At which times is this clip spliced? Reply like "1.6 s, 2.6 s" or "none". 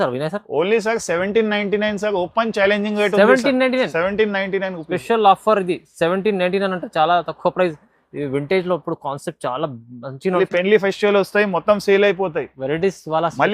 10.4 s